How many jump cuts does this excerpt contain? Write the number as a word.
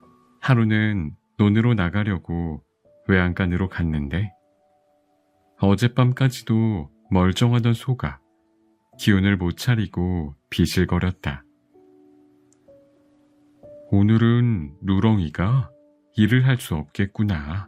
two